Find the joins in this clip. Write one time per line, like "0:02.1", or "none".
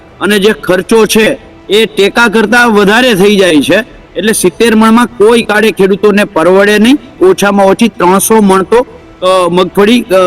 0:07.1